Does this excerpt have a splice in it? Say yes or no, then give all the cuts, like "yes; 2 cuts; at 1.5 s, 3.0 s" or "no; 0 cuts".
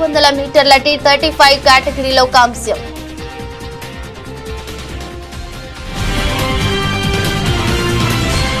no; 0 cuts